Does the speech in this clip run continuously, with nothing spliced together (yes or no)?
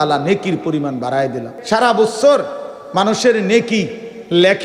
no